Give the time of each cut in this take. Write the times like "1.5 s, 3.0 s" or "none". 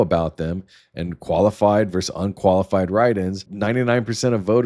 3.4 s